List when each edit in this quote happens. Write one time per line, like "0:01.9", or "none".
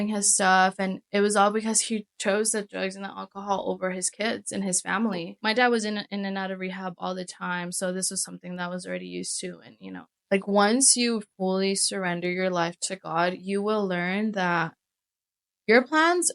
0:05.3
0:10.1